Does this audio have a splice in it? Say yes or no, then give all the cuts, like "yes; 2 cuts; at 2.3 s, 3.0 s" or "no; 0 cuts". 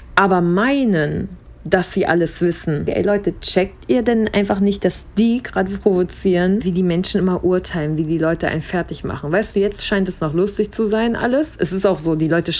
yes; 2 cuts; at 2.9 s, 6.6 s